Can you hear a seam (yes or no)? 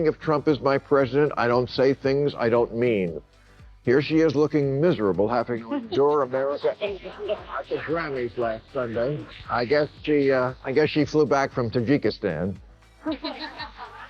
yes